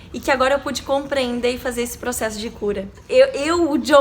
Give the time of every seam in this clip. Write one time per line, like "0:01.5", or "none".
0:02.9